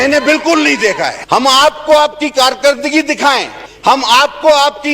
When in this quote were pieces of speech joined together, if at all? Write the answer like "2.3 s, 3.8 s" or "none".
1.2 s